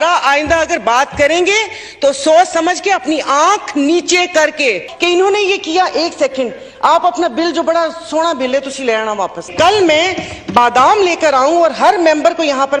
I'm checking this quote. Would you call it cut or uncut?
cut